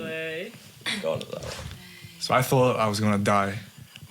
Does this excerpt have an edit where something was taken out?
yes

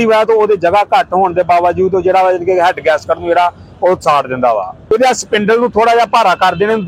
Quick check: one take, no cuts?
no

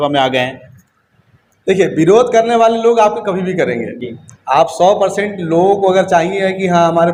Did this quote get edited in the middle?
no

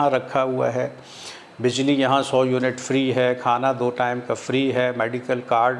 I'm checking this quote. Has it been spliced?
no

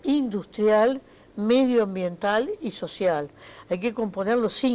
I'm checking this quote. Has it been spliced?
yes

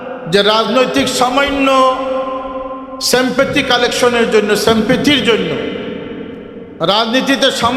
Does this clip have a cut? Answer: no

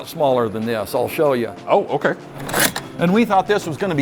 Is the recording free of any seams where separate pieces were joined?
no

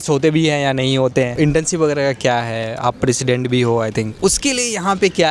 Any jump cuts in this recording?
yes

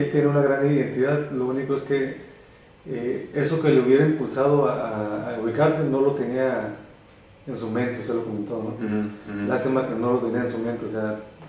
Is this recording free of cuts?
yes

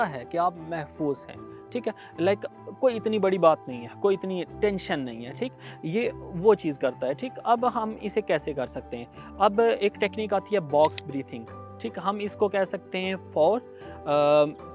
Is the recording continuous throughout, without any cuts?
yes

